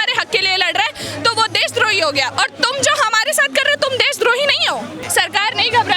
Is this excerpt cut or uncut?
cut